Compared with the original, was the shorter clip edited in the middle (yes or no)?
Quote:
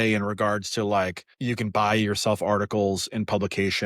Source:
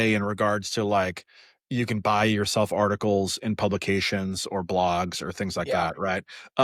yes